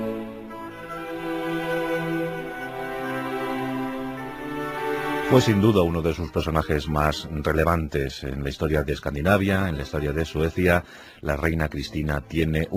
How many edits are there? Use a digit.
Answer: 0